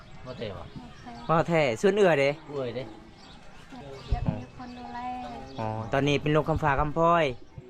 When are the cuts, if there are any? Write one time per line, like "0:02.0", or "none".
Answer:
0:03.8